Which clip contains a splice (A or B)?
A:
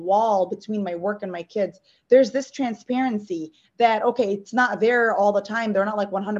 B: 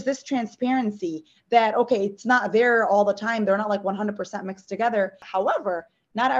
B